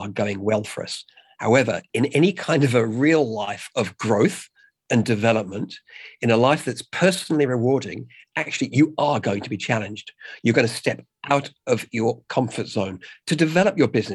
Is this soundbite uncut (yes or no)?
no